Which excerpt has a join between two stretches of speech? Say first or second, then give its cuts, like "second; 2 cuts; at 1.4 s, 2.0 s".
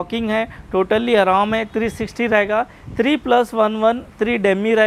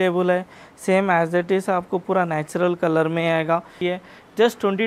second; 1 cut; at 3.7 s